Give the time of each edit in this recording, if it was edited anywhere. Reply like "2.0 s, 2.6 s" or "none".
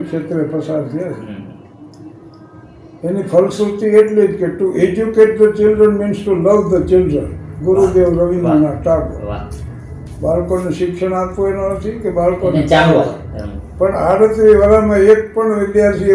none